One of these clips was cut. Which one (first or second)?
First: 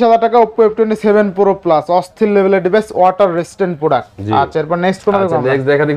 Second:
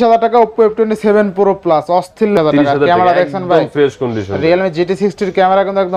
second